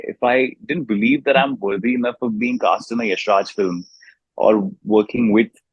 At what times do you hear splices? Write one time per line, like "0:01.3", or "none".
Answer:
none